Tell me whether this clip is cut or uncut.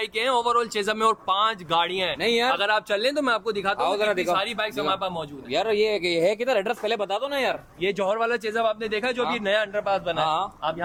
uncut